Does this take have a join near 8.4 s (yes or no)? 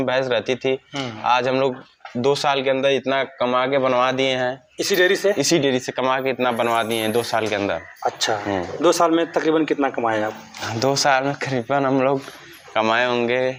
no